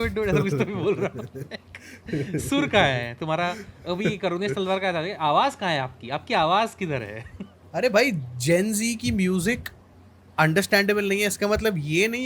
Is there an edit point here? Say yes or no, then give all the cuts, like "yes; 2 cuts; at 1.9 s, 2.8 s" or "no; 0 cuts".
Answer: no; 0 cuts